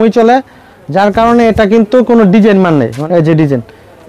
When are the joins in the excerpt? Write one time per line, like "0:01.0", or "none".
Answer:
0:03.0